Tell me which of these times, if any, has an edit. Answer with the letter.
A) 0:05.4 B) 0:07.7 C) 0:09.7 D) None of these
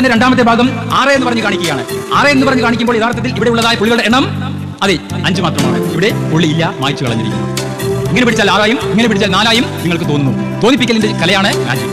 D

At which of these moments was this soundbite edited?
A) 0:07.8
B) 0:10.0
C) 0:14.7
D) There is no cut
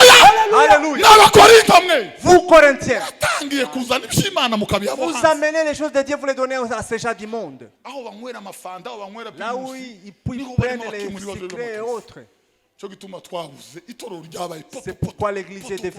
A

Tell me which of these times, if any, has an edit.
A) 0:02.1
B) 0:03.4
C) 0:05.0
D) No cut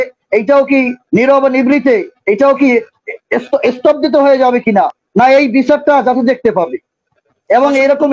D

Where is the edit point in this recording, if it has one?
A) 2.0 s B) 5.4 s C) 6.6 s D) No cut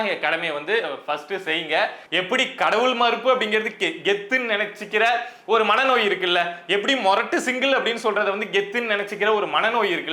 A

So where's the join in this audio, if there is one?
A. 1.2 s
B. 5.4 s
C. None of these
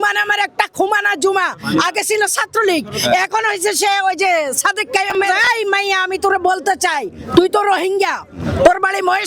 B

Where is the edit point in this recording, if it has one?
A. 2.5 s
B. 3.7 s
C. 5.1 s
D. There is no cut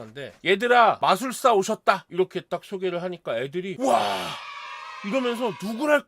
B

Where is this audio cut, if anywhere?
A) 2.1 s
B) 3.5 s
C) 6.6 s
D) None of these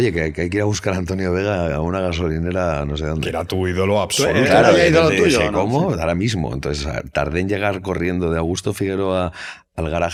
D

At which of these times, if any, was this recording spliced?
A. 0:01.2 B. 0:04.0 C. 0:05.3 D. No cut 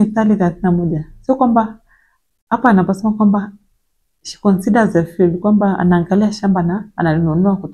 D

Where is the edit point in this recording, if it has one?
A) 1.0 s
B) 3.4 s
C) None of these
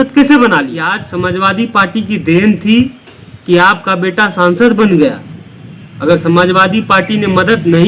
A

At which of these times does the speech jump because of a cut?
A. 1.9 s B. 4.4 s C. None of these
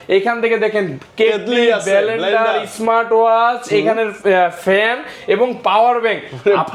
C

